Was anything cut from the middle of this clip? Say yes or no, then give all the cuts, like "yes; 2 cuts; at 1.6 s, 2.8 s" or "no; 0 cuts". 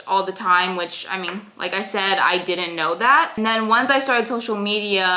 yes; 1 cut; at 3.3 s